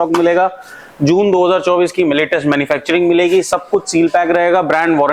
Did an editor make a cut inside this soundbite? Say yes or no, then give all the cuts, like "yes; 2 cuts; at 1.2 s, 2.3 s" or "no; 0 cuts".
no; 0 cuts